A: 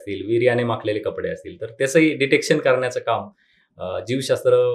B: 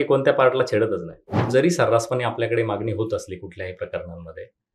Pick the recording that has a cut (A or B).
B